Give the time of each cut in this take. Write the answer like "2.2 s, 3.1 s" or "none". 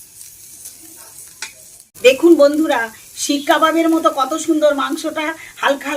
1.8 s